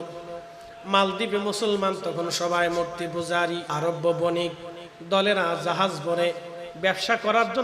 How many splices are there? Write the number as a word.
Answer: one